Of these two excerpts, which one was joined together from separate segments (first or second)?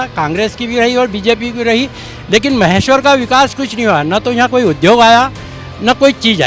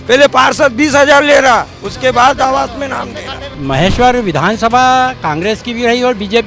second